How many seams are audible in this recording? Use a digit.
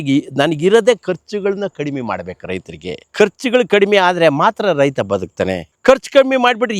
1